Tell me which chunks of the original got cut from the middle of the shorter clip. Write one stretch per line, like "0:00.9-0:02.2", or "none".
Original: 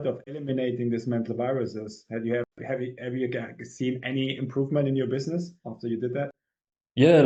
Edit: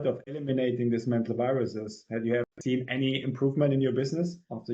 0:02.5-0:03.7